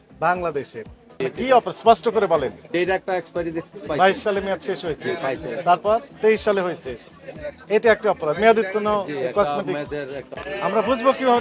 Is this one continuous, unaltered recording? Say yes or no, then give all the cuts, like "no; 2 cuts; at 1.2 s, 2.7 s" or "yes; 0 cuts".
no; 2 cuts; at 1.2 s, 10.3 s